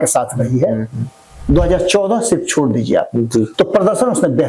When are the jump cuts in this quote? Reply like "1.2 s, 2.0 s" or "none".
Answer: 3.5 s